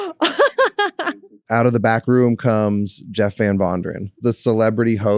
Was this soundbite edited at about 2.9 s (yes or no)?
no